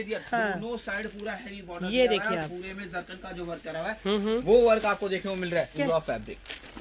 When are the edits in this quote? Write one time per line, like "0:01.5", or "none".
0:05.7